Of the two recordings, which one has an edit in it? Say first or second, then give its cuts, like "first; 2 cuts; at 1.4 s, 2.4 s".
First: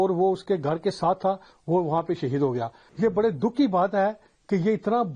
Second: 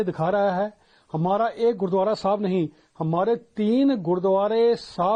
first; 1 cut; at 2.8 s